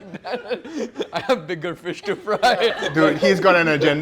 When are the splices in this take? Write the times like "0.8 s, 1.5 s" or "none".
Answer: 2.7 s